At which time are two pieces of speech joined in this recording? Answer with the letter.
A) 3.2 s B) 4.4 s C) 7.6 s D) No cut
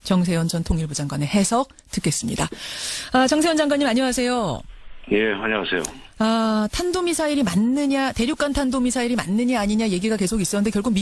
B